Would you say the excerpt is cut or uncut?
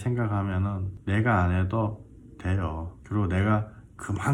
cut